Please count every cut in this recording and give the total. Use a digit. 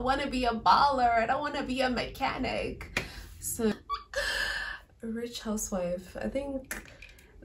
1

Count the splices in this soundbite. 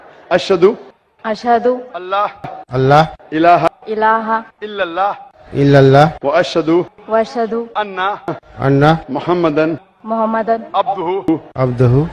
8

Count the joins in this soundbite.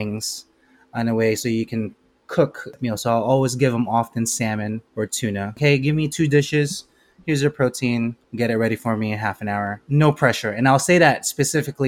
4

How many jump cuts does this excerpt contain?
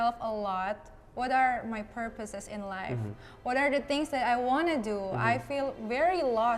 0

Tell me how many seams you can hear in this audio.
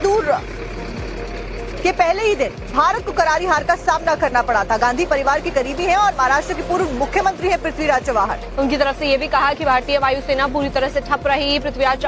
1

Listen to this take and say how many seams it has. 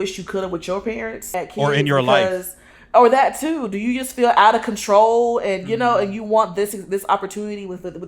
1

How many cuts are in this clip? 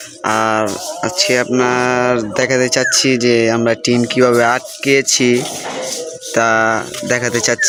0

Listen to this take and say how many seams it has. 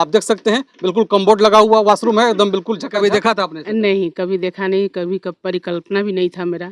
1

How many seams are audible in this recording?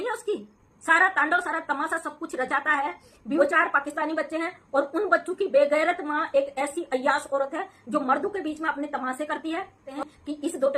2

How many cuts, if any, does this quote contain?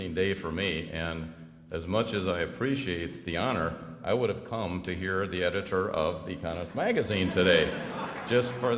0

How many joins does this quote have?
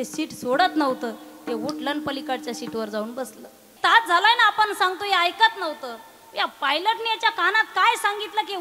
1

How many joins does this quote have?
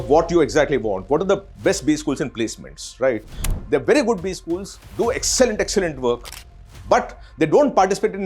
1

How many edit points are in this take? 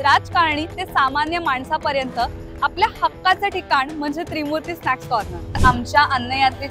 1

